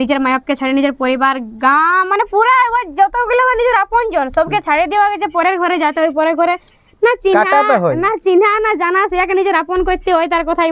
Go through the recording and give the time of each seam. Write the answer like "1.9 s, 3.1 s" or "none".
none